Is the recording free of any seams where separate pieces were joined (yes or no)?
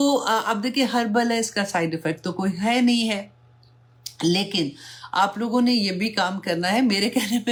yes